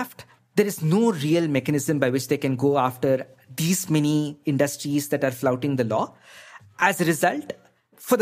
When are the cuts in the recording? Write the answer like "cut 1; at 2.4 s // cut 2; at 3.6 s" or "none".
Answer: none